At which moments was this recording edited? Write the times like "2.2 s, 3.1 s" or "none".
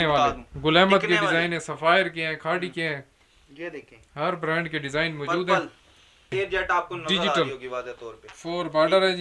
6.3 s